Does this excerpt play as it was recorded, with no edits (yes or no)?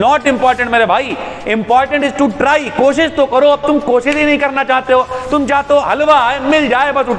yes